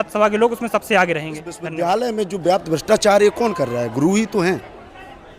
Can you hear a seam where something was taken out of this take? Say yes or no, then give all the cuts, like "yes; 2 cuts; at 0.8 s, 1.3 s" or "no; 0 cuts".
yes; 1 cut; at 1.6 s